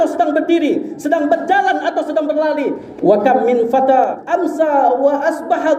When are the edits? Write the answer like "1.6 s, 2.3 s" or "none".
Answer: 2.8 s, 4.2 s